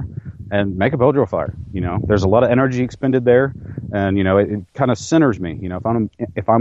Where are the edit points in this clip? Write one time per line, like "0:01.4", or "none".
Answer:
none